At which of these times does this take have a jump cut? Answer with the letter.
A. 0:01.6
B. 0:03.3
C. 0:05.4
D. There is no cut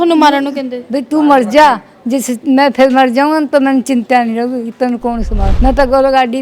C